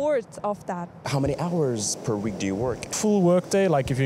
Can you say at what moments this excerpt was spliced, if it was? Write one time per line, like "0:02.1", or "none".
0:01.0